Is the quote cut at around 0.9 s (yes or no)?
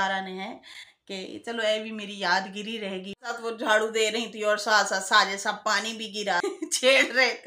no